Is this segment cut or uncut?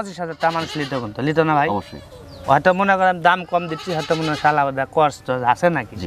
uncut